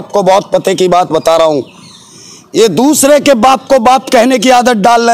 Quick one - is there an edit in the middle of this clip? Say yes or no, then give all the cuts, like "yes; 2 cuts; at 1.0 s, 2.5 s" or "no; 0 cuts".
no; 0 cuts